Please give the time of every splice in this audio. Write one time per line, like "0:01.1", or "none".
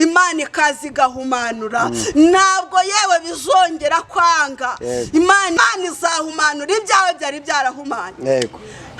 0:05.6